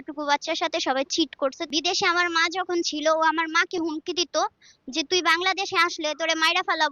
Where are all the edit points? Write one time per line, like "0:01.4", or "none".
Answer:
0:01.7